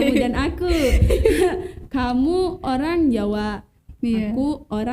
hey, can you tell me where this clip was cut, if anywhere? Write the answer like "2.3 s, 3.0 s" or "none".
none